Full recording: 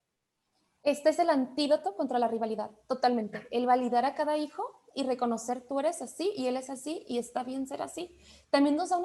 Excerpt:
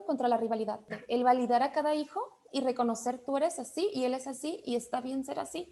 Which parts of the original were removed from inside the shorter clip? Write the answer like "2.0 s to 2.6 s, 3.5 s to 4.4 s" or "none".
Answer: 2.8 s to 3.4 s